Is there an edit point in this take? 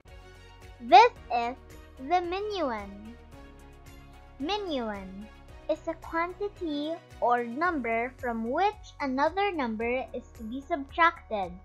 no; 0 cuts

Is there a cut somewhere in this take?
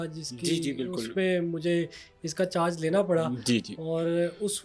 no; 0 cuts

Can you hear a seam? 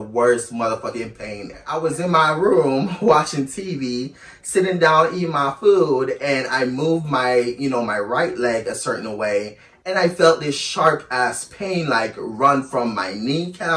yes; 1 cut; at 1.7 s

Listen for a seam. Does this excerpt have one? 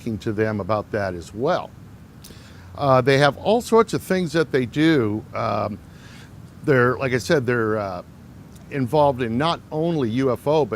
yes; 1 cut; at 9.7 s

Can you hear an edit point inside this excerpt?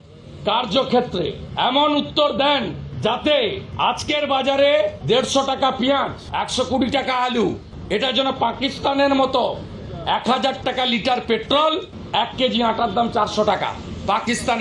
yes; 7 cuts; at 1.4 s, 2.8 s, 3.7 s, 5.0 s, 6.2 s, 7.7 s, 11.9 s

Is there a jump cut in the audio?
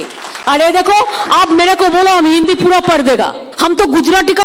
yes; 1 cut; at 3.5 s

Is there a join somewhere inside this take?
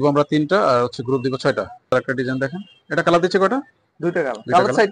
yes; 1 cut; at 1.9 s

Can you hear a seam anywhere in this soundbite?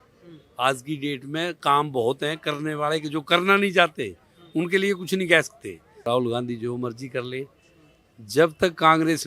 yes; 1 cut; at 6.1 s

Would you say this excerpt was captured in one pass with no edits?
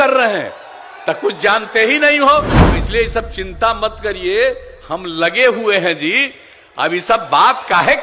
no; 1 cut; at 2.8 s

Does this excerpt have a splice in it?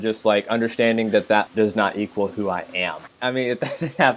yes; 2 cuts; at 1.5 s, 3.1 s

